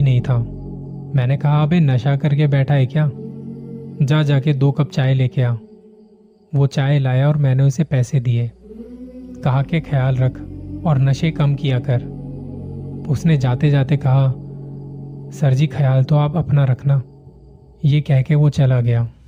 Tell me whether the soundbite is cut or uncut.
uncut